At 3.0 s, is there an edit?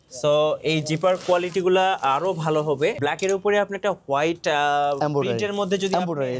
yes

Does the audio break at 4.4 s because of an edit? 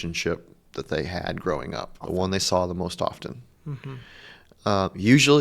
no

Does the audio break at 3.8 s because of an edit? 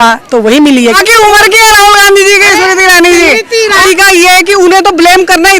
yes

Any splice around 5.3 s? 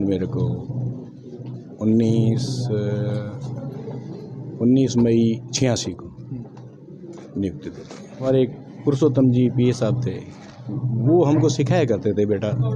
no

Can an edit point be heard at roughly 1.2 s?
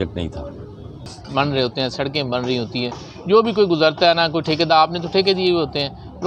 yes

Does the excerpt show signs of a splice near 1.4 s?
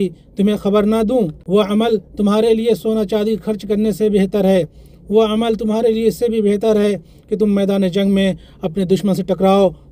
yes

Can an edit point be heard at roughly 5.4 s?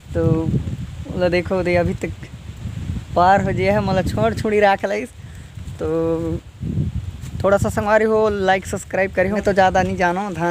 no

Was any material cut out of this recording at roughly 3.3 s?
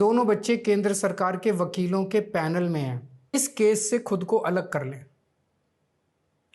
yes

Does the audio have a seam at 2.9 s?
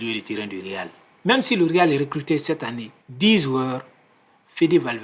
no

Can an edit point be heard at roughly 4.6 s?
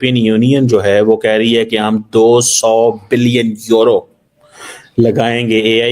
no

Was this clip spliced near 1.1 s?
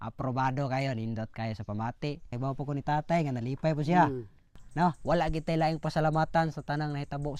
no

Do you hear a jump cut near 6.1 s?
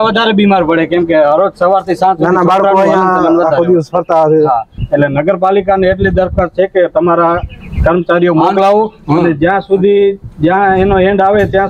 no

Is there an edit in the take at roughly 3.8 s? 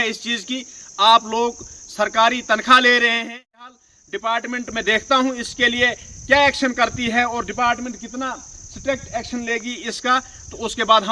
yes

